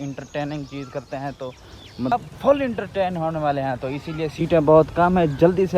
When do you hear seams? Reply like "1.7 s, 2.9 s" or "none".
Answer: 2.1 s